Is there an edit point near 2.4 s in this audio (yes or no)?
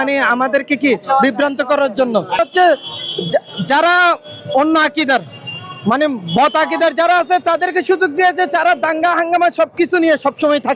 yes